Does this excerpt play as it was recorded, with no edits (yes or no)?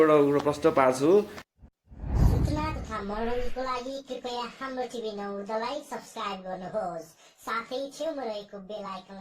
no